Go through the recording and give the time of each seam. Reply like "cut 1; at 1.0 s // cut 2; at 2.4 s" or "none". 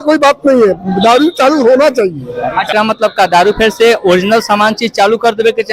cut 1; at 2.7 s